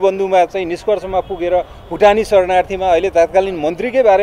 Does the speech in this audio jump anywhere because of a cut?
no; 0 cuts

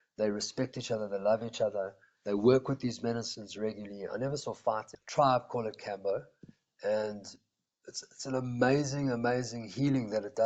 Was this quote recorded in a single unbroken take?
no; 1 cut; at 5.0 s

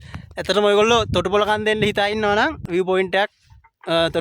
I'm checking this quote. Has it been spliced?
yes; 1 cut; at 2.6 s

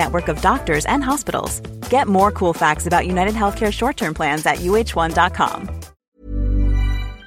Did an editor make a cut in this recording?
yes; 1 cut; at 6.0 s

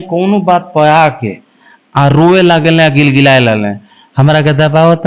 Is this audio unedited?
yes; 0 cuts

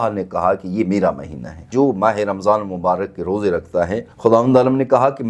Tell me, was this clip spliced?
yes; 2 cuts; at 1.6 s, 4.1 s

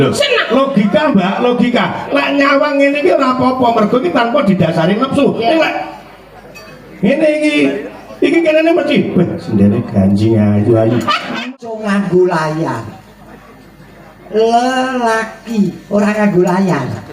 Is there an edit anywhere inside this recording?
yes; 1 cut; at 11.4 s

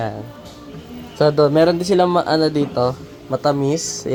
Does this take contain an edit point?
no; 0 cuts

